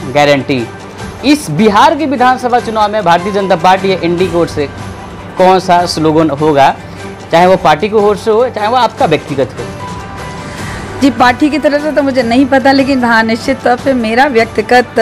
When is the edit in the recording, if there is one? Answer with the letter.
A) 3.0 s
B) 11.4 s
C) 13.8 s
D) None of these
D